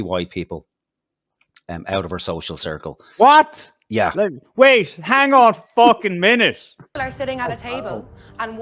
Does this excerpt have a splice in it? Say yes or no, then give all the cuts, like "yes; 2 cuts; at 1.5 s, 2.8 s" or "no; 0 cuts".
yes; 1 cut; at 6.9 s